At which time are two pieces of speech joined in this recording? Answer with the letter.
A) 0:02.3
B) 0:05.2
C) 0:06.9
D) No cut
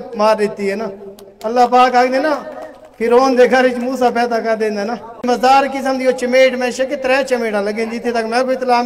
B